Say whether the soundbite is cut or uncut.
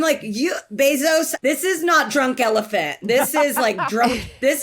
cut